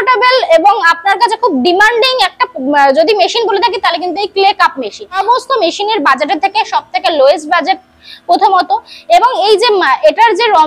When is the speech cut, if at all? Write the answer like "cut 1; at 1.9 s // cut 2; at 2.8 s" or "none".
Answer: cut 1; at 5.2 s